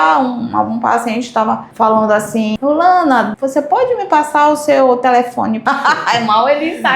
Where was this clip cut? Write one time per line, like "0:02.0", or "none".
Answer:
0:02.5
0:03.4
0:05.6